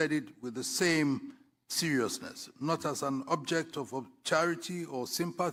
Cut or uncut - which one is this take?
uncut